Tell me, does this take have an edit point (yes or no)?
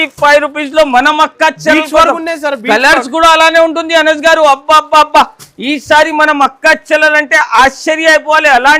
no